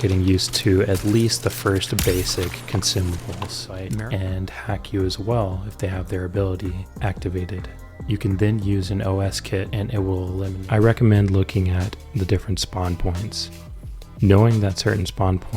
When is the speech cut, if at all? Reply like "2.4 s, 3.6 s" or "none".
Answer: 3.8 s, 10.6 s

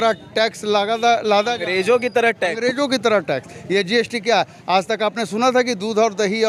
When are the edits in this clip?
none

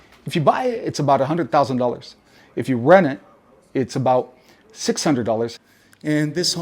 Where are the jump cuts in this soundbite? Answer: 5.6 s

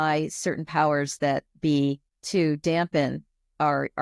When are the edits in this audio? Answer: 2.1 s

